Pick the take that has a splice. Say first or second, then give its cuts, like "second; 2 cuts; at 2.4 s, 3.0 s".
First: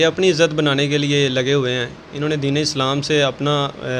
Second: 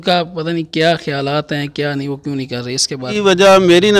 second; 1 cut; at 3.1 s